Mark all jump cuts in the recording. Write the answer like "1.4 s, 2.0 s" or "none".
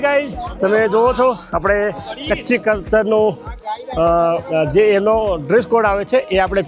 none